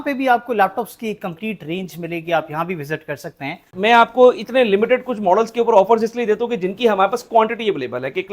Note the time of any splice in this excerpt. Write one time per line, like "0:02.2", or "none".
0:03.7

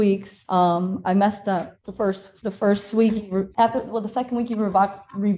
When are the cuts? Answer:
none

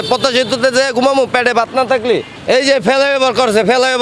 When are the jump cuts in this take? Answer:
0:02.3

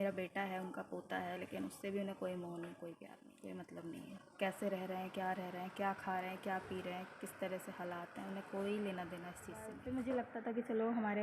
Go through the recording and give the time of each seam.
0:03.2
0:09.8

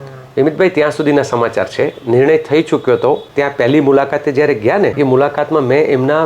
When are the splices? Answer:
0:03.3
0:04.9

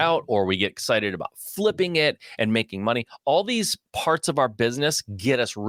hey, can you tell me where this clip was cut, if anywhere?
none

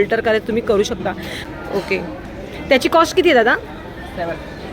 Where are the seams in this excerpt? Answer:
0:01.4

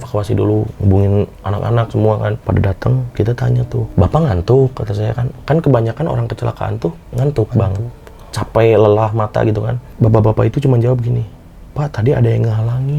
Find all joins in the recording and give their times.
0:02.4
0:03.9
0:09.8

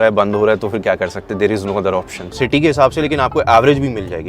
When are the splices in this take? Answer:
0:02.2

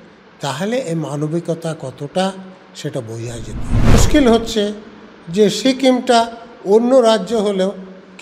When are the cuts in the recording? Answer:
0:03.9

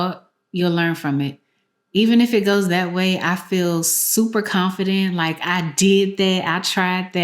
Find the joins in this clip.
none

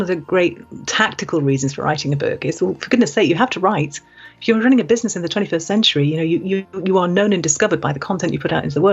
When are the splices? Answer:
none

